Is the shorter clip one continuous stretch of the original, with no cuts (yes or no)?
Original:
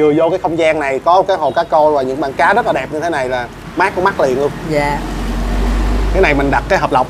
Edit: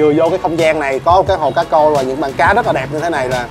yes